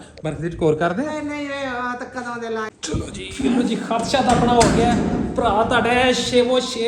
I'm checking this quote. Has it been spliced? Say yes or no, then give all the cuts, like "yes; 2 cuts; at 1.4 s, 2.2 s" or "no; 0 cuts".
yes; 1 cut; at 2.7 s